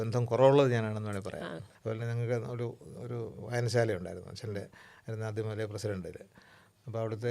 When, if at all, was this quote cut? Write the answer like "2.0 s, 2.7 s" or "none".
1.7 s